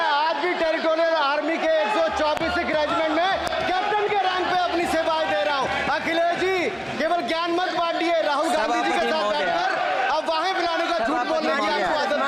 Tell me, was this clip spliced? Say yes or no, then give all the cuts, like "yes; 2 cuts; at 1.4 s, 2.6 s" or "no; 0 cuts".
no; 0 cuts